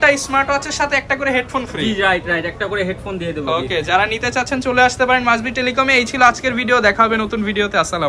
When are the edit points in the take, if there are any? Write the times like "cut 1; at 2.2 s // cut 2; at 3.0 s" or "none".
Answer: none